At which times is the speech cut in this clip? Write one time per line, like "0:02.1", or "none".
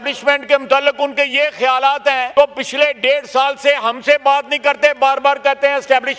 0:02.3